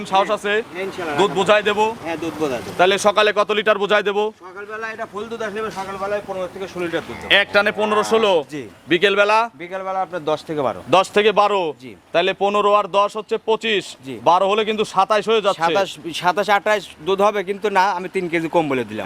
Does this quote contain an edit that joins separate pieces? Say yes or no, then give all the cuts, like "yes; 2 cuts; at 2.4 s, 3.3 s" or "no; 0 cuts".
no; 0 cuts